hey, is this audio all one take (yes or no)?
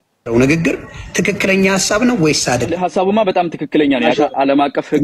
no